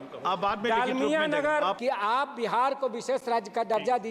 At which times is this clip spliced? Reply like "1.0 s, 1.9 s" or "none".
1.8 s